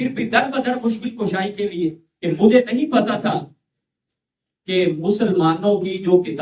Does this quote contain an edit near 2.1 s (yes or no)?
yes